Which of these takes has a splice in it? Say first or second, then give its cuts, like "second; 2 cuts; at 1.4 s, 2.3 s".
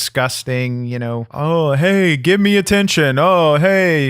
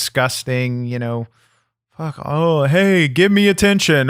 first; 1 cut; at 1.3 s